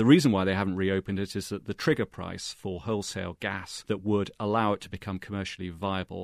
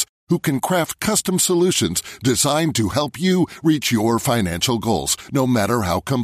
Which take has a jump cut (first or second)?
first